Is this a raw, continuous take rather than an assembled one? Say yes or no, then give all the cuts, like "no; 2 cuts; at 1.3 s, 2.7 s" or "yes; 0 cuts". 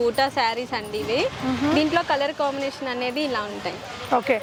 yes; 0 cuts